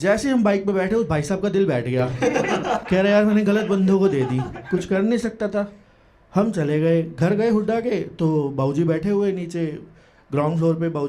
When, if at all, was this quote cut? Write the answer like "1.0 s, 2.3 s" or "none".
none